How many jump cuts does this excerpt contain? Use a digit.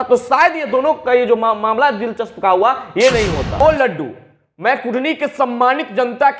1